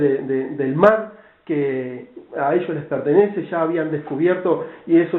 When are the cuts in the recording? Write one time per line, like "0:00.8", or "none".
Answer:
0:01.5